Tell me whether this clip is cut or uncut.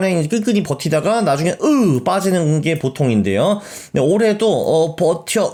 uncut